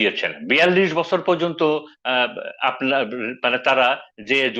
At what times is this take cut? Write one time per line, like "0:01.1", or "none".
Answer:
none